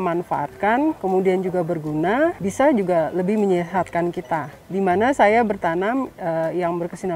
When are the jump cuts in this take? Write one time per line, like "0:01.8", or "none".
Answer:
0:01.0
0:02.4
0:04.6